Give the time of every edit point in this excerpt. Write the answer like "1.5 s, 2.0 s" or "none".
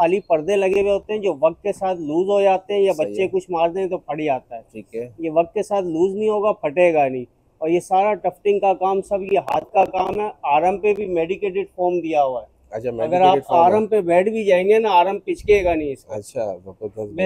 none